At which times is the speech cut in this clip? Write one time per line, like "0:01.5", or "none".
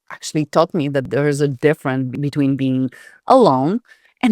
0:01.1
0:02.2